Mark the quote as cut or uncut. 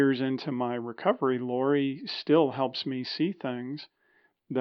uncut